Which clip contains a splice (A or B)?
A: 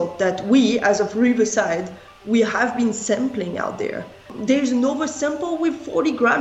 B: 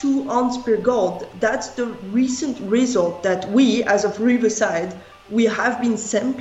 A